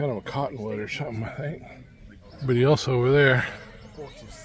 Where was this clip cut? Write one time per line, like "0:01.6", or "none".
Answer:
0:02.2